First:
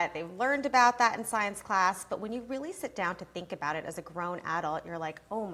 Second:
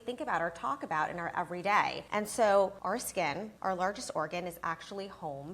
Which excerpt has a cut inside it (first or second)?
second